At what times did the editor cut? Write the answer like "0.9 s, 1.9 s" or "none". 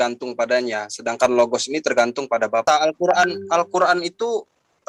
none